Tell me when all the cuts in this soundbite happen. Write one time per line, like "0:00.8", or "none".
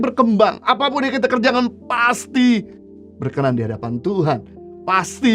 none